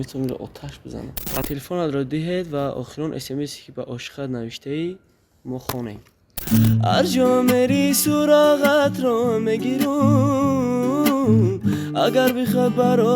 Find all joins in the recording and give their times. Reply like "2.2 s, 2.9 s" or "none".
1.5 s, 6.4 s